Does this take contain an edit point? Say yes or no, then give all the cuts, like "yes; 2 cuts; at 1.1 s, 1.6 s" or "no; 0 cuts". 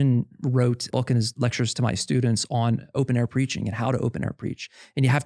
yes; 2 cuts; at 0.8 s, 2.9 s